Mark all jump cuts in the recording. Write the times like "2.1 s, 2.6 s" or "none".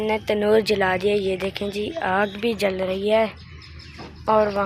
none